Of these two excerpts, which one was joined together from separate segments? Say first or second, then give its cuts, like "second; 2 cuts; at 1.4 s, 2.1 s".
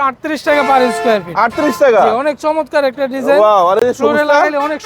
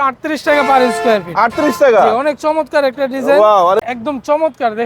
second; 1 cut; at 3.8 s